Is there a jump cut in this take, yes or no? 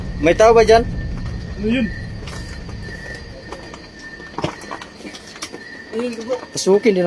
no